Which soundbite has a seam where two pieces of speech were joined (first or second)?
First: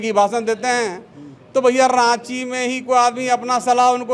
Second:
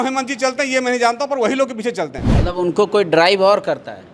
second